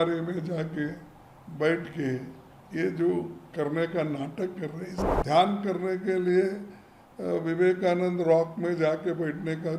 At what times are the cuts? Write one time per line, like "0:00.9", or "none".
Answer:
0:04.9